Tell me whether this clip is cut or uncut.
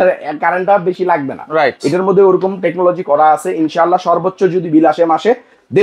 uncut